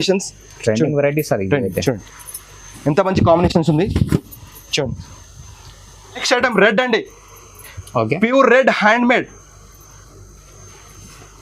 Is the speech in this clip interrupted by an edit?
yes; 1 cut; at 6.1 s

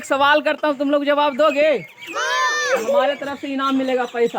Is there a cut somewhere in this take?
no; 0 cuts

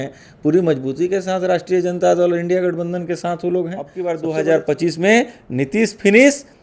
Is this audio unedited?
no; 1 cut; at 4.0 s

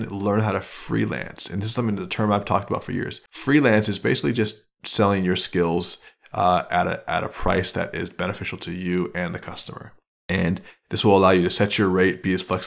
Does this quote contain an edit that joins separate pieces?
no; 0 cuts

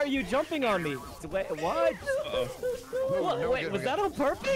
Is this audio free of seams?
no; 1 cut; at 1.1 s

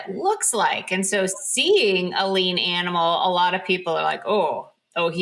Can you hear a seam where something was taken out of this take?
no; 0 cuts

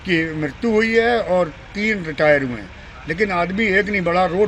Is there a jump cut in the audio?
no; 0 cuts

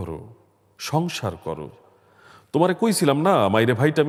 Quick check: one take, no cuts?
yes; 0 cuts

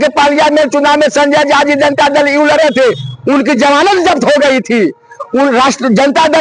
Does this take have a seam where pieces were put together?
no; 0 cuts

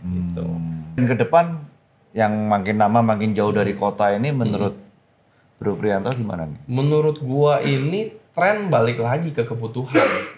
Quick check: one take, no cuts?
no; 1 cut; at 1.0 s

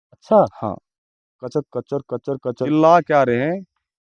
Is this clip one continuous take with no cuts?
no; 1 cut; at 2.7 s

